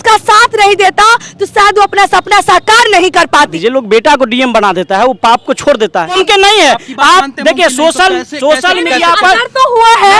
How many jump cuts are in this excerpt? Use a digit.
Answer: 2